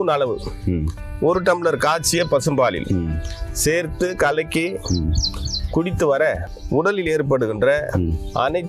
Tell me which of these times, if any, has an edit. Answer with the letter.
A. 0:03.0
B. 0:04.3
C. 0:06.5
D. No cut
C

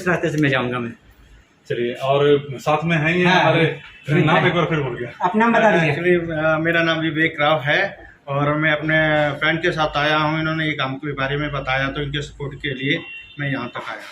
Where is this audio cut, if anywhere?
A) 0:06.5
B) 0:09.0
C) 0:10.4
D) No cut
D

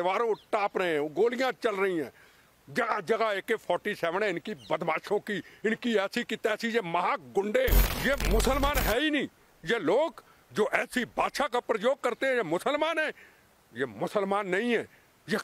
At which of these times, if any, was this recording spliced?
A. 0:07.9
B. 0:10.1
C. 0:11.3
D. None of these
A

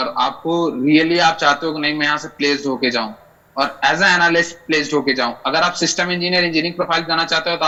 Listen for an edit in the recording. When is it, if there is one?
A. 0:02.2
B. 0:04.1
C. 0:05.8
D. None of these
D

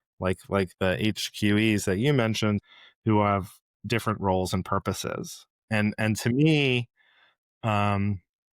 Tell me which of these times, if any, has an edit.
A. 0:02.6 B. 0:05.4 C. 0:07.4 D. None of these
A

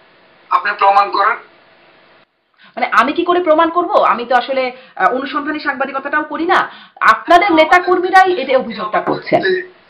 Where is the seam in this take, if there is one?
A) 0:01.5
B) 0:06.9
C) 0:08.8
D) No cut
D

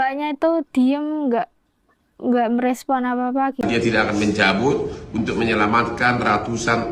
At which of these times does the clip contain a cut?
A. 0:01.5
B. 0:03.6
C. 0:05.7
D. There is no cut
B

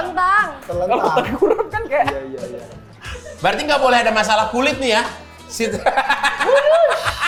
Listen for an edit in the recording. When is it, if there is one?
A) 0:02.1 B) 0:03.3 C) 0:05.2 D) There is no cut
D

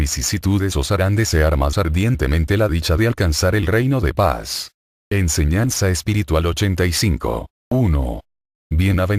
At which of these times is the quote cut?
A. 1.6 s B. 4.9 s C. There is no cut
C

